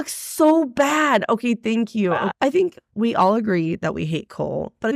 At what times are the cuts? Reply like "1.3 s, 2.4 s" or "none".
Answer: 2.3 s

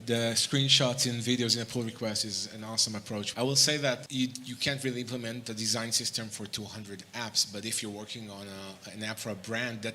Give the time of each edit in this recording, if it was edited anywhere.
3.3 s, 4.1 s

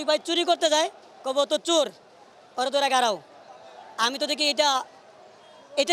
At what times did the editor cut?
none

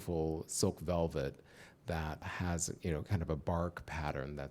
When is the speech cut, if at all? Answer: 2.3 s

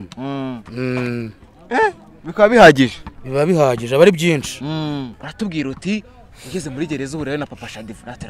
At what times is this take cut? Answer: 5.1 s

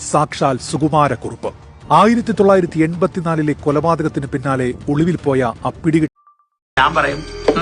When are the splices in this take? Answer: 6.7 s

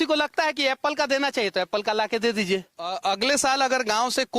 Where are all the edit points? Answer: 2.9 s

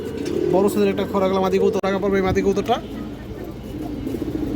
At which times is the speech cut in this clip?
1.8 s

